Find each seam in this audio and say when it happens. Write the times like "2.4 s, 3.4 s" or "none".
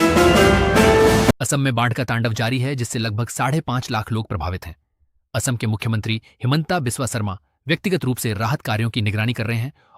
1.4 s

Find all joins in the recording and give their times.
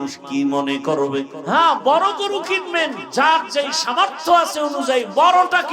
1.4 s, 3.0 s

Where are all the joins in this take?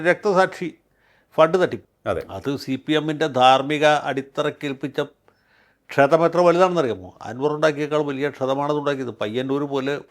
1.9 s

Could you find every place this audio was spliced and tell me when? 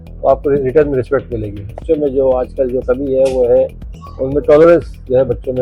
1.8 s

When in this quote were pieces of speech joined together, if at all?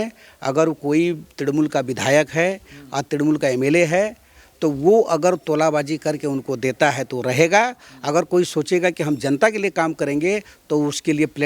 none

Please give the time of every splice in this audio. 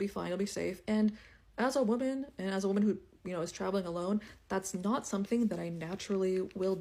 none

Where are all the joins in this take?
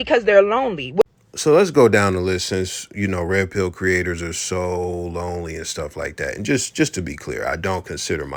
none

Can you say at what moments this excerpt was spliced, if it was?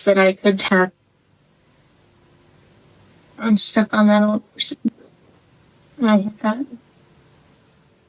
none

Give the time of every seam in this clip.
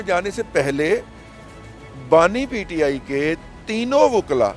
none

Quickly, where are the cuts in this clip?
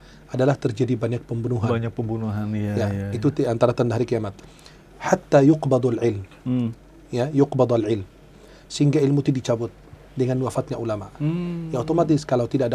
4.4 s

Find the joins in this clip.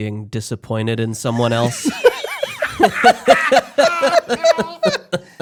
none

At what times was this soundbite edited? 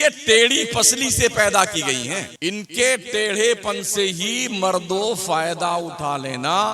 2.2 s

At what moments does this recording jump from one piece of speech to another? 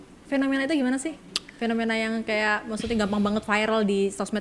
none

